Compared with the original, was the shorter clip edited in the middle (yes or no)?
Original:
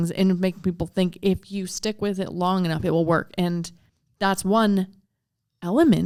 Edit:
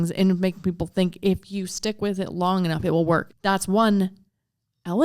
yes